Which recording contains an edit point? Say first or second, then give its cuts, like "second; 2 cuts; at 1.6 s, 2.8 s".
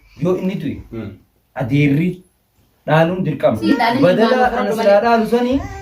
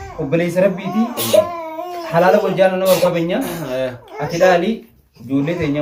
first; 1 cut; at 3.7 s